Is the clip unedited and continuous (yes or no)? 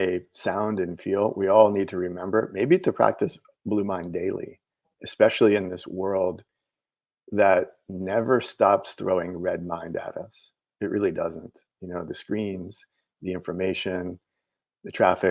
yes